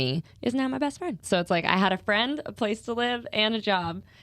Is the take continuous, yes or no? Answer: no